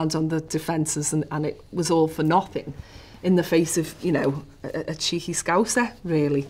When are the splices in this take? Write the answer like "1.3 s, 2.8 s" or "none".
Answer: none